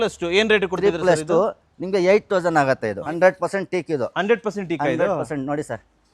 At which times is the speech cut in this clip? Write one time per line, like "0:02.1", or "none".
0:03.0